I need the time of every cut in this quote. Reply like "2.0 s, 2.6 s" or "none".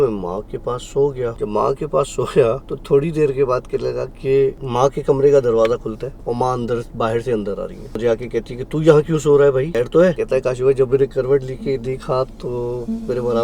1.3 s, 2.7 s, 4.6 s, 6.1 s, 8.0 s, 10.1 s